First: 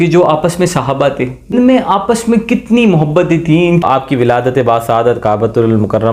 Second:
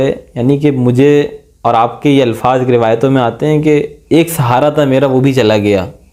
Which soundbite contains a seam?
first; 2 cuts; at 1.5 s, 3.8 s

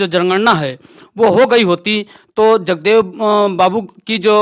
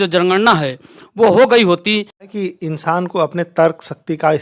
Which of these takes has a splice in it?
second; 1 cut; at 2.3 s

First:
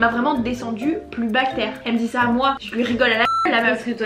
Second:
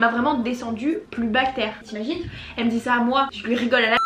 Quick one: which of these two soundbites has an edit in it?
first; 1 cut; at 1.8 s

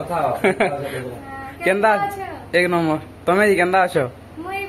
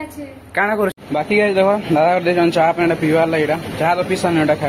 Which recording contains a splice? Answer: second; 1 cut; at 1.0 s

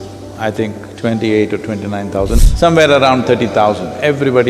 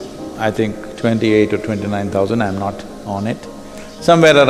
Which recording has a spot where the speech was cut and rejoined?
first; 1 cut; at 2.4 s

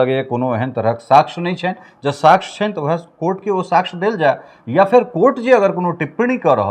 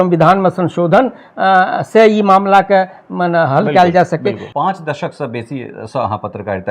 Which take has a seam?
second; 1 cut; at 4.5 s

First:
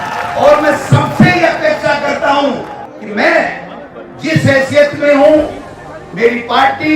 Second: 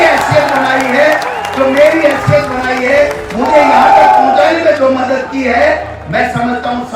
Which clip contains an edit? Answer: first; 1 cut; at 2.7 s

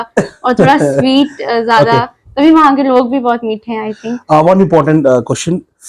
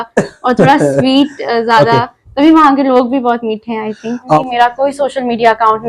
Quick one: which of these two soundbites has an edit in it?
second; 1 cut; at 4.4 s

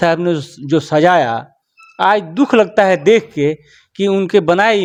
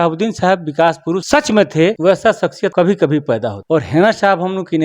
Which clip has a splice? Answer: second; 3 cuts; at 1.2 s, 2.1 s, 3.6 s

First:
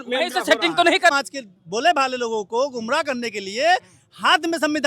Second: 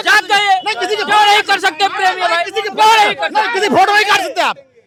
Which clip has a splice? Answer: first; 1 cut; at 1.1 s

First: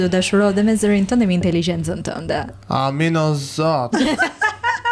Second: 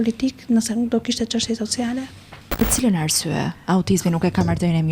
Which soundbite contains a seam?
second; 1 cut; at 2.6 s

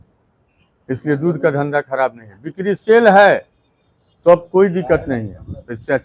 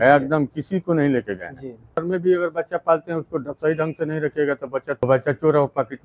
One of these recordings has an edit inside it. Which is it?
second; 2 cuts; at 2.0 s, 5.0 s

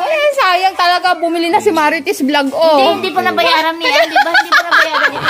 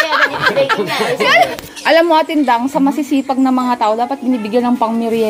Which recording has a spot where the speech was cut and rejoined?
second; 1 cut; at 1.7 s

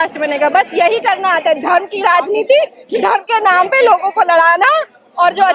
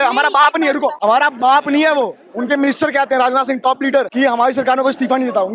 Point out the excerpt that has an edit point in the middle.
second; 3 cuts; at 1.0 s, 2.3 s, 4.1 s

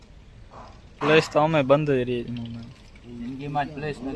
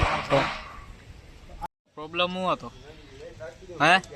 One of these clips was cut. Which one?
second; 1 cut; at 1.7 s

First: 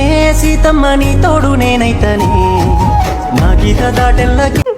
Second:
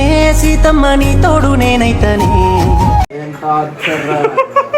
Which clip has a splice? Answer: second; 1 cut; at 3.1 s

